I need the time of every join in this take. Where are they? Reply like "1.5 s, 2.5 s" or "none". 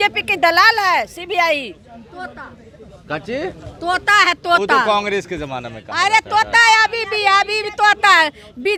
none